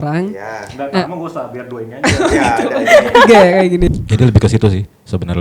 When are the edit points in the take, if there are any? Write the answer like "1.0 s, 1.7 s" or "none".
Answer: 4.0 s